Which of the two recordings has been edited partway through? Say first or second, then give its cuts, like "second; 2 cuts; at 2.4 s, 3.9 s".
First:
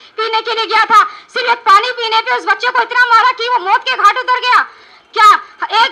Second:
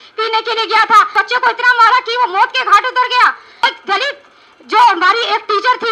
second; 2 cuts; at 1.1 s, 3.6 s